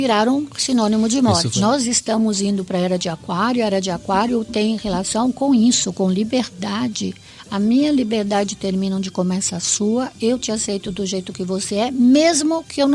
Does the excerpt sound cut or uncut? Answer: cut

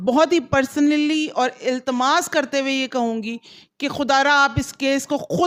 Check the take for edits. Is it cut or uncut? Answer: uncut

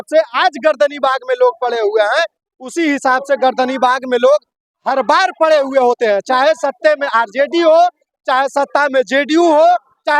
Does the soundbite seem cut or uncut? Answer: uncut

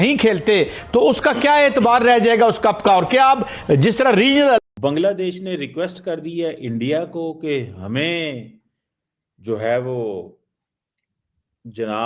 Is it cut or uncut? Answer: cut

